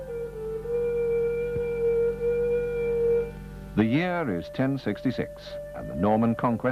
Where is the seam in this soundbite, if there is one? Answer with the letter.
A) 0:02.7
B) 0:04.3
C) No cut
A